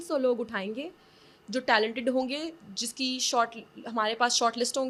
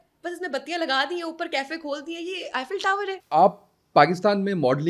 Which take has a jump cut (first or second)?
second